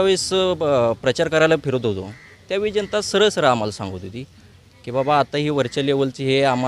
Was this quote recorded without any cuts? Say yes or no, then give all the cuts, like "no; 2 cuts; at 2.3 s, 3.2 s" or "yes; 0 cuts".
yes; 0 cuts